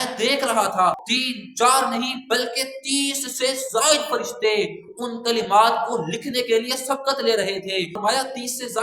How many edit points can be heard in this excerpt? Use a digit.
2